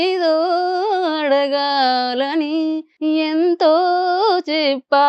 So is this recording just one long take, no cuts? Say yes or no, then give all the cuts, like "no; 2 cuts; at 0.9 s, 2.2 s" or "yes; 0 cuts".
no; 1 cut; at 2.9 s